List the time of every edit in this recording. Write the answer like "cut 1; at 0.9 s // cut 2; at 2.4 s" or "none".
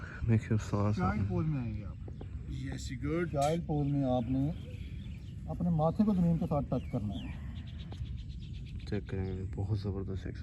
none